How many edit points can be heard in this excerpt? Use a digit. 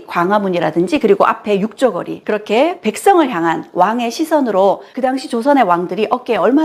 2